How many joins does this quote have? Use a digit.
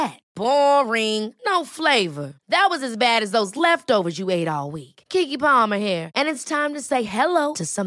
0